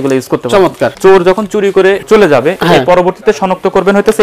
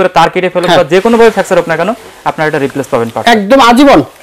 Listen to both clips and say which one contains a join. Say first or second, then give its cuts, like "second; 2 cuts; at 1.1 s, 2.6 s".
first; 2 cuts; at 0.9 s, 2.0 s